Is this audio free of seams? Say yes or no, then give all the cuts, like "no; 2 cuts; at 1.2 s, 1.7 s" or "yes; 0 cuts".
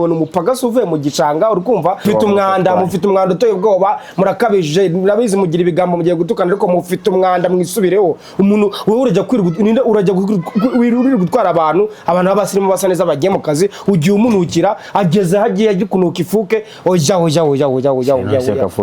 no; 1 cut; at 2.0 s